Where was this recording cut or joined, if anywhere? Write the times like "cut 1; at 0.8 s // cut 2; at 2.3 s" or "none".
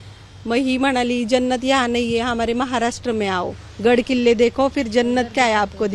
none